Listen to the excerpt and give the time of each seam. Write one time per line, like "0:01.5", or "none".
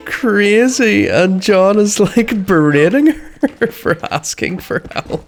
none